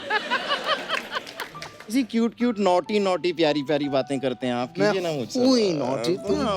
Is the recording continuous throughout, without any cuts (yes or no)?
yes